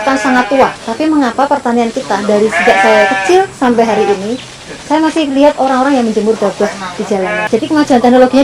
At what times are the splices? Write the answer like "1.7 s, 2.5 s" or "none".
0.8 s, 7.4 s

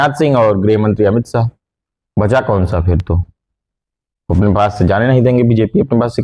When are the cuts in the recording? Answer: none

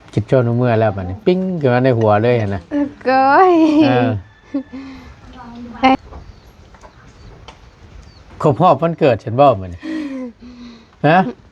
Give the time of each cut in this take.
6.0 s

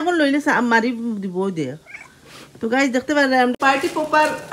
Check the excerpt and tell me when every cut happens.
3.5 s

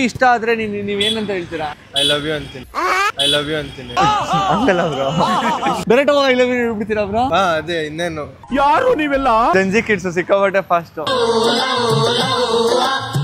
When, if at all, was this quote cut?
none

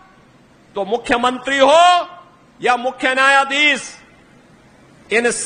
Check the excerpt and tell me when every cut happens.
none

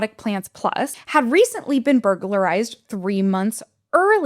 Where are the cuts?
1.0 s

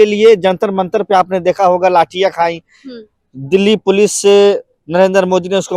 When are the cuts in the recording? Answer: none

